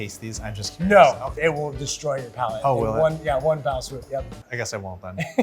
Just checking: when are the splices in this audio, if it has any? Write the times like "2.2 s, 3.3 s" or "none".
1.3 s, 4.4 s